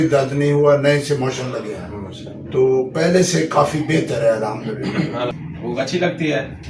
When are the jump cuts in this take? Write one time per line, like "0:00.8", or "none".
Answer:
0:05.3